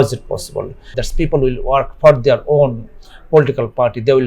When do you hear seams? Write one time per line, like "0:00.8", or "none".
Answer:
0:01.0